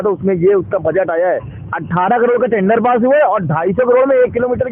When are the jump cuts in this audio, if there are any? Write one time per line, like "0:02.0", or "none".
none